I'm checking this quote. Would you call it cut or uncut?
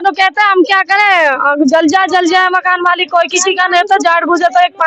uncut